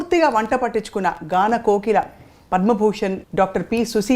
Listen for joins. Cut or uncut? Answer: cut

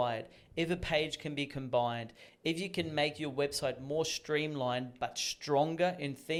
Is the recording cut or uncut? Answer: uncut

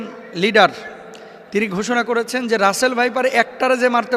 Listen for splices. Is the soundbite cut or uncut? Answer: uncut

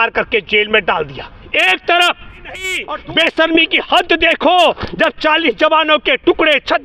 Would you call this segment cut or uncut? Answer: cut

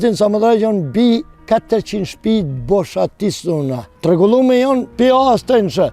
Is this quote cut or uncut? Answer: cut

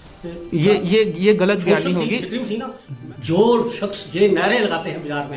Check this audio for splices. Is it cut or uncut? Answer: cut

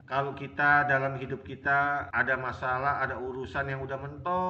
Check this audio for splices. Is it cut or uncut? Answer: uncut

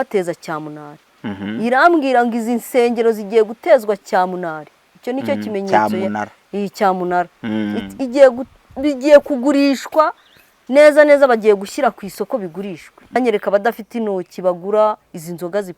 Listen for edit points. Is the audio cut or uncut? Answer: cut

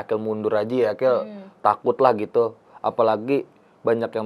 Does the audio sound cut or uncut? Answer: uncut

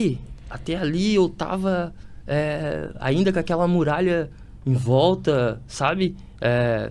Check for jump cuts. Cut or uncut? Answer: uncut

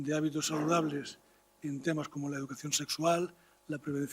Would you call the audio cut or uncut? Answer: cut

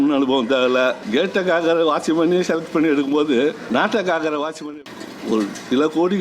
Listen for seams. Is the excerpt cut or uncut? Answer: cut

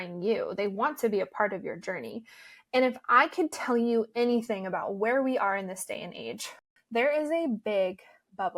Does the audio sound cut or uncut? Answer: cut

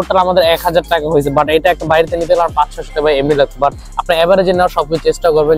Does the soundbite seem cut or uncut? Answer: uncut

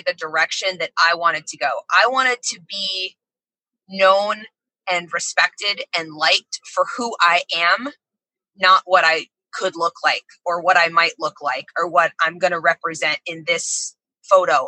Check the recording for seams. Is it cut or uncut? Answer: uncut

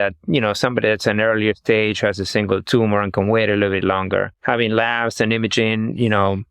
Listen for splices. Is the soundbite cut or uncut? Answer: cut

